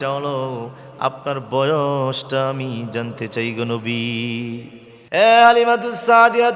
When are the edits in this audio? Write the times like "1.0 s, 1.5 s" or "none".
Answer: 4.9 s